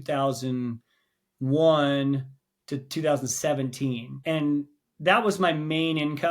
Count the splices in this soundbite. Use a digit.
1